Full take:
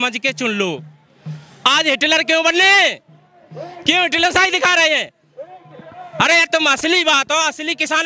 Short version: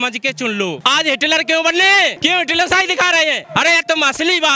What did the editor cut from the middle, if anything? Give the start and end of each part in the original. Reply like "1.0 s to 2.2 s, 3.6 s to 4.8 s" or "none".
0.8 s to 1.6 s, 3.0 s to 3.8 s, 5.1 s to 6.1 s